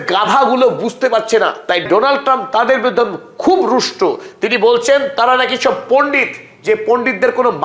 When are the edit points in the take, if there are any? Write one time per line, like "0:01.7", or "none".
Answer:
none